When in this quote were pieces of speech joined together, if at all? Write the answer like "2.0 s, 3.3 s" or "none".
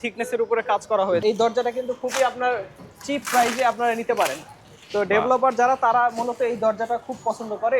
1.2 s